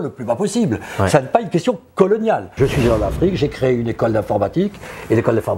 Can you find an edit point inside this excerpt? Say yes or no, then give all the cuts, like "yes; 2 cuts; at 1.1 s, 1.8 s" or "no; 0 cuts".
yes; 1 cut; at 2.5 s